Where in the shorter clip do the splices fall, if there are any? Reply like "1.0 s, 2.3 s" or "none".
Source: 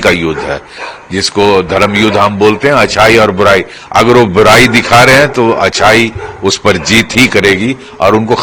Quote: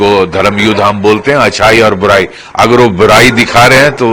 none